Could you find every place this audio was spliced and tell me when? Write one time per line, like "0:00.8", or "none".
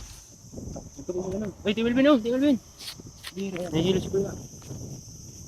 0:03.7